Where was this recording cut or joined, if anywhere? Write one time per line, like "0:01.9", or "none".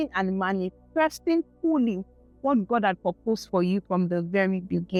none